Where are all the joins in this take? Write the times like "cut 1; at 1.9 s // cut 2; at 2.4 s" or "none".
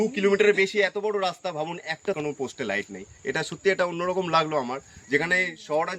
cut 1; at 2.2 s